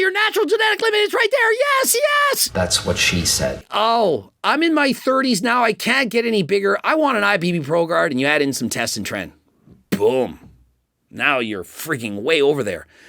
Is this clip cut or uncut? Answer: cut